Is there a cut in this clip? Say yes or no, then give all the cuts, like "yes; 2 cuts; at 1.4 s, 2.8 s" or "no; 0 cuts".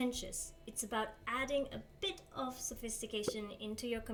no; 0 cuts